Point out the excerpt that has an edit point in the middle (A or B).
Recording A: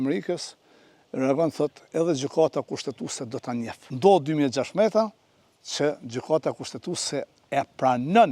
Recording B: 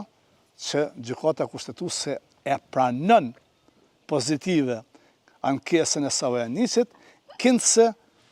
A